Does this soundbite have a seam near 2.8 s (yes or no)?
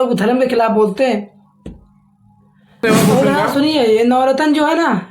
yes